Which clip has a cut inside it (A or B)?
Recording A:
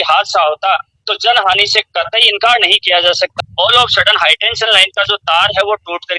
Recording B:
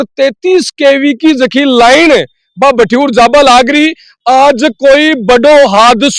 A